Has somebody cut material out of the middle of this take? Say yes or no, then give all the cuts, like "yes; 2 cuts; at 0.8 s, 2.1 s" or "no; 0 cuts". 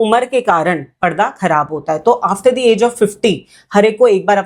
no; 0 cuts